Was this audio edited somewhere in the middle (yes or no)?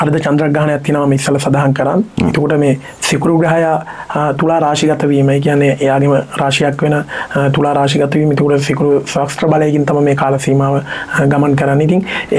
no